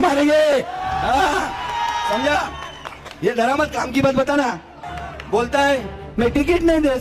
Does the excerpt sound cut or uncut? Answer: uncut